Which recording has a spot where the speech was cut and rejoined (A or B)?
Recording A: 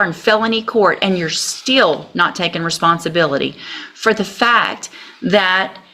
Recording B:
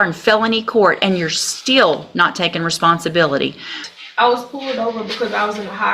B